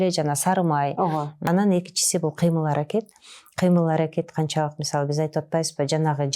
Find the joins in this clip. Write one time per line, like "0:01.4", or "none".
0:01.4